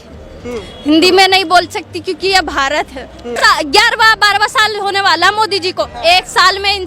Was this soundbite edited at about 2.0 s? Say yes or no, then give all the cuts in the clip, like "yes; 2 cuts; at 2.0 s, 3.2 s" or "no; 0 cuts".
no; 1 cut; at 3.4 s